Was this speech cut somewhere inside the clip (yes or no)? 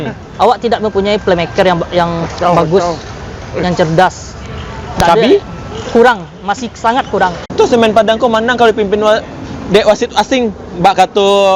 yes